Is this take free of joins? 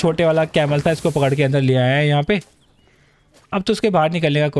yes; 0 cuts

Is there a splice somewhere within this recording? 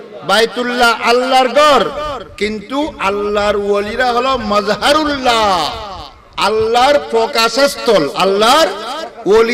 no; 0 cuts

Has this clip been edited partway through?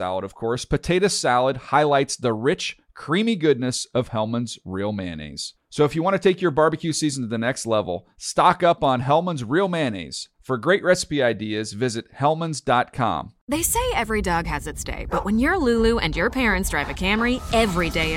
yes; 1 cut; at 13.3 s

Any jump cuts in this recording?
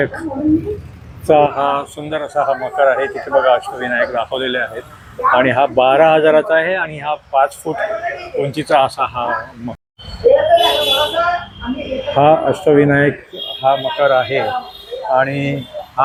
no; 0 cuts

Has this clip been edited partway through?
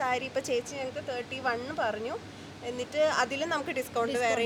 no; 0 cuts

